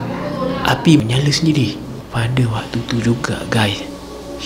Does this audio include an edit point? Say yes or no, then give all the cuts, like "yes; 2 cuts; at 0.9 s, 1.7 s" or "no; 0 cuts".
no; 0 cuts